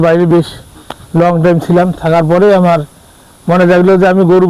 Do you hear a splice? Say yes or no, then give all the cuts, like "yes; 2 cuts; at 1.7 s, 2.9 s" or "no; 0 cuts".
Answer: no; 0 cuts